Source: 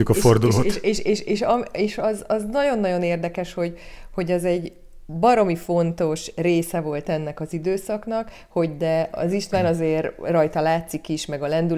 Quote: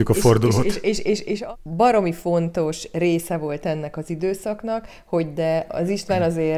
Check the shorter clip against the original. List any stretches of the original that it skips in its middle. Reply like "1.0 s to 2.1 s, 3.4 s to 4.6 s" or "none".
1.4 s to 4.8 s

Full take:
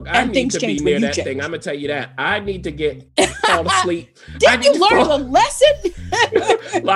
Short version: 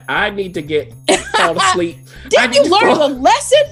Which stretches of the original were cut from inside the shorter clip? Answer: none

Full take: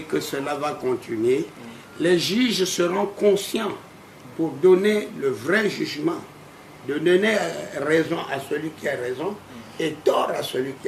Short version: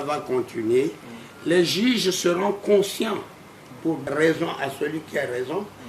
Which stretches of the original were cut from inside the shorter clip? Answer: 4.5 s to 7.7 s

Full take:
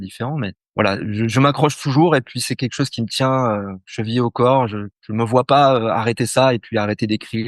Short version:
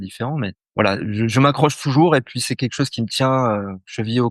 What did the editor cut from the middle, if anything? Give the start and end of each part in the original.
none

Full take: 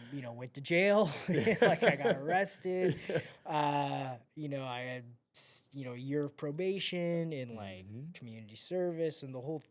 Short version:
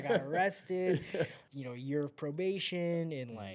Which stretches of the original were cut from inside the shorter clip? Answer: 3.4 s to 5.6 s

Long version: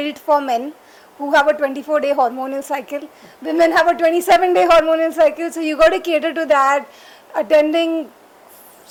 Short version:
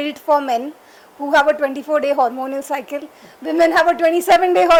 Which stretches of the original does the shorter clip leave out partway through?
none

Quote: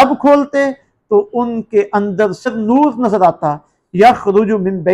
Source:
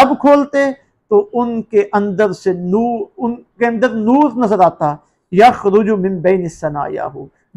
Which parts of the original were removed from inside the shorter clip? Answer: 2.5 s to 3.8 s

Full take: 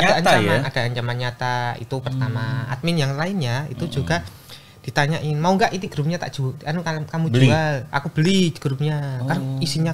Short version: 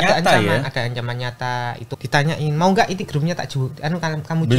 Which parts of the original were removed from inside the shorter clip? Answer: 1.9 s to 4.7 s

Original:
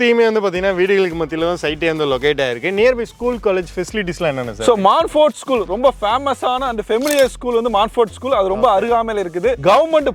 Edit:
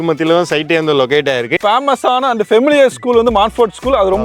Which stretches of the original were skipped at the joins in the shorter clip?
2.7 s to 6.0 s

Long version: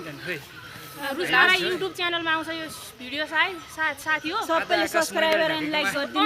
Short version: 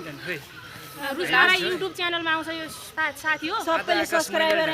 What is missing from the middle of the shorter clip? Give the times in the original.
2.8 s to 3.7 s

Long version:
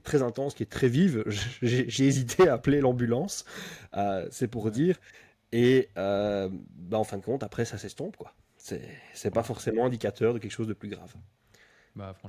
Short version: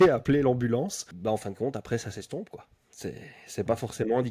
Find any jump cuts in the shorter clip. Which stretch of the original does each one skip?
3.4 s to 6.7 s

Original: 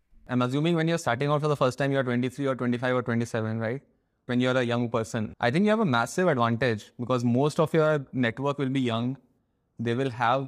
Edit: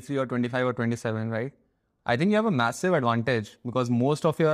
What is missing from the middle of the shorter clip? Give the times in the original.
4.2 s to 5.3 s

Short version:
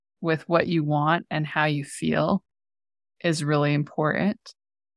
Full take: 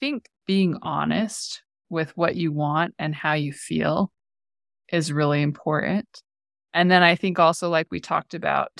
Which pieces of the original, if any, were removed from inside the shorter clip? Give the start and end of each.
none

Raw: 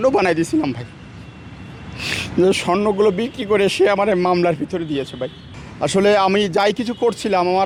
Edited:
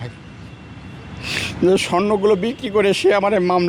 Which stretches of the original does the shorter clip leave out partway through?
none

